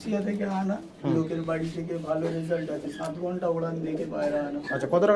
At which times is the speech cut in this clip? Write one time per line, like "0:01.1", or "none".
none

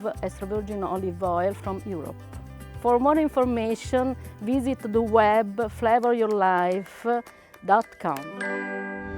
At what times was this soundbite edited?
0:08.3

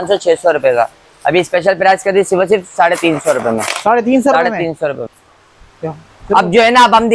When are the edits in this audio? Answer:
none

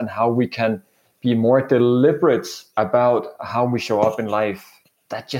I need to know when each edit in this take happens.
0:02.6

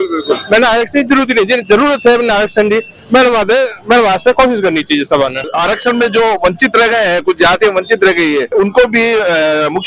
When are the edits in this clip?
0:05.5
0:08.5

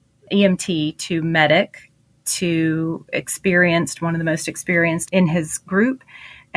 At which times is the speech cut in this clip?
0:05.6

